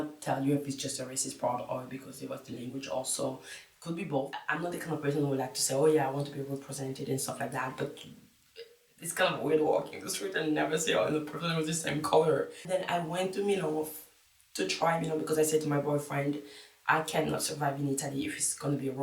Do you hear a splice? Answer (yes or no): yes